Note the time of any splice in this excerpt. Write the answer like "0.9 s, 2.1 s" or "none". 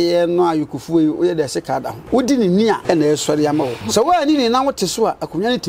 2.0 s, 2.8 s, 3.8 s